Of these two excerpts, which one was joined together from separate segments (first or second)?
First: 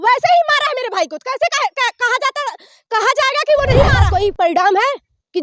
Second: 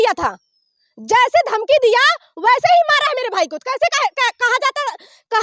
first